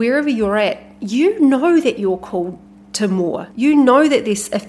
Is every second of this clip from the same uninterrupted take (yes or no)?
no